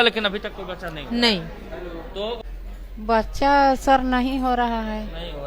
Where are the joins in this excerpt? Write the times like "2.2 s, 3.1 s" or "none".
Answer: 2.4 s